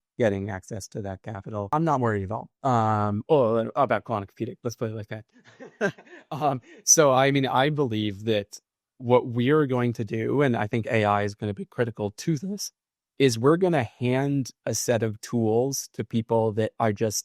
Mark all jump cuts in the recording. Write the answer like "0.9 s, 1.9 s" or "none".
1.7 s

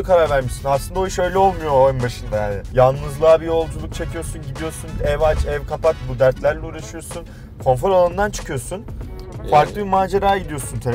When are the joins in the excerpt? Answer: 2.6 s

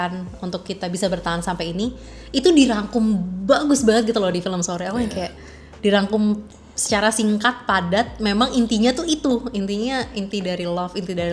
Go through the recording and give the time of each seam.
none

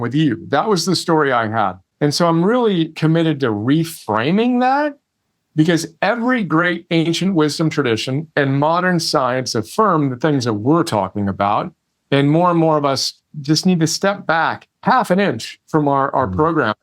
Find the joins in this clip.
1.8 s, 2.9 s, 14.8 s

